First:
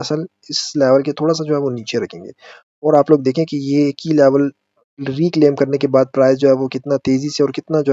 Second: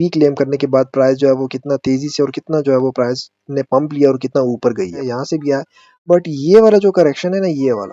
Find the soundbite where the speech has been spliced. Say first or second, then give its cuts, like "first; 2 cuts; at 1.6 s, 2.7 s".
second; 1 cut; at 5.0 s